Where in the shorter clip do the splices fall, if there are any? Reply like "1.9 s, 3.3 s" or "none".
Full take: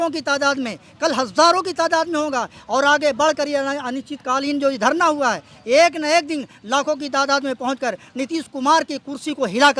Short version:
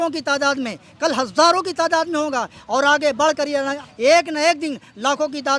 3.8 s